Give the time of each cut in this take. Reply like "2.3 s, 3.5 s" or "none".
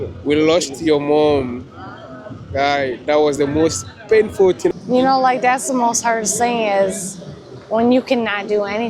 4.7 s